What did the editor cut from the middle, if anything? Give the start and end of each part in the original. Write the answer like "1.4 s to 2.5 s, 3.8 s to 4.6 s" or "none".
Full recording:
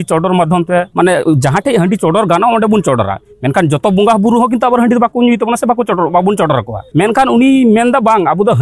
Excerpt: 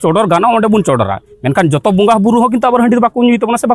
none